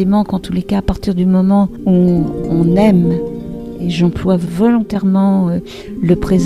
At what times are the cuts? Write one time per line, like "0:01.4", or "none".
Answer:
0:01.8
0:04.5